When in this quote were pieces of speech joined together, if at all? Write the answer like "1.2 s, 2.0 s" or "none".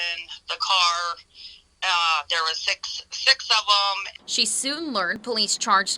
4.1 s